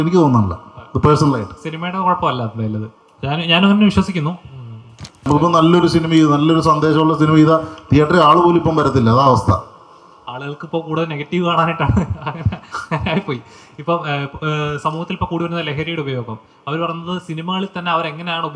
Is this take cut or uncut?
cut